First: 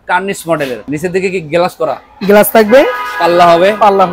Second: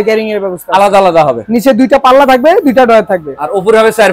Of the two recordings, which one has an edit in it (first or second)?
second